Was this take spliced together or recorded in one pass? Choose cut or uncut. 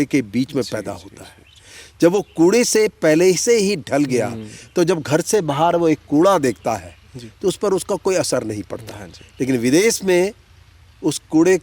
uncut